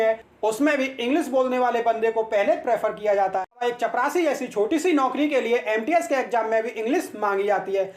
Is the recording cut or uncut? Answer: cut